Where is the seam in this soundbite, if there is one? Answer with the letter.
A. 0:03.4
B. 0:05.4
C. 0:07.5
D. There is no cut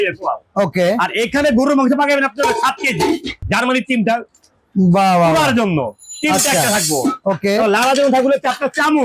A